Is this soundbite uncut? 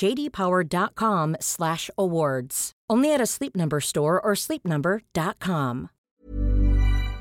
no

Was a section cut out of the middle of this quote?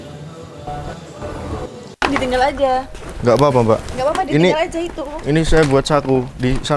yes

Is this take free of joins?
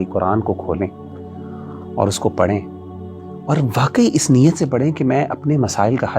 yes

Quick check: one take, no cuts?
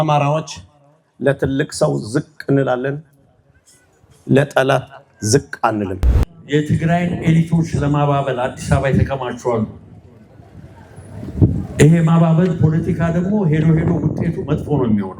no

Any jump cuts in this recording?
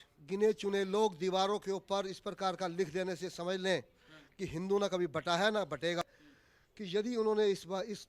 yes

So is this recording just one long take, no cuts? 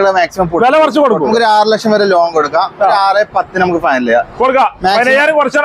no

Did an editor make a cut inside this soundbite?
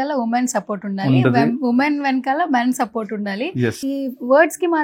no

